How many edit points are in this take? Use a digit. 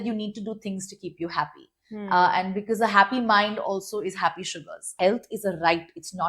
1